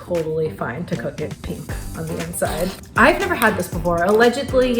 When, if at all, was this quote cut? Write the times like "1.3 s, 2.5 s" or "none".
1.4 s, 2.8 s